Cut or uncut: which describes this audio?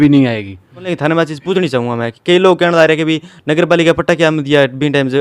cut